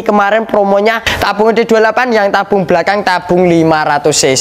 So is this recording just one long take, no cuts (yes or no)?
no